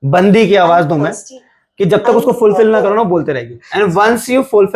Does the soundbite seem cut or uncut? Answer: uncut